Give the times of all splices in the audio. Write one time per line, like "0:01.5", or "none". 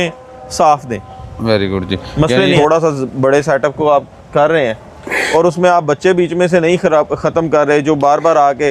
0:02.4